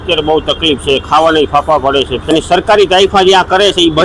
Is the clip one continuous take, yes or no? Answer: no